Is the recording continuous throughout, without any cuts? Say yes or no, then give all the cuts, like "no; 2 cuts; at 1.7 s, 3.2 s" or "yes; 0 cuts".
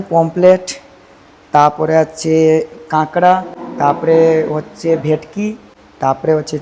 yes; 0 cuts